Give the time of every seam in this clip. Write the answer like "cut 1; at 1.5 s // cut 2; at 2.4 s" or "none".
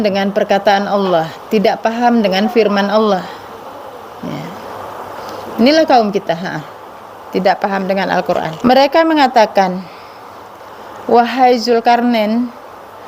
cut 1; at 8.6 s